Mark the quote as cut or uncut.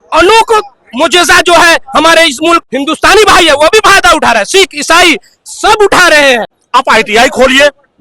cut